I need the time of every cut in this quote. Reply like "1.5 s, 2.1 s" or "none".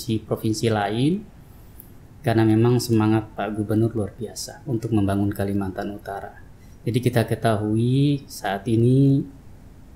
none